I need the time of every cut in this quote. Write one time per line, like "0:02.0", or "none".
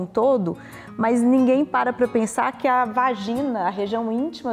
none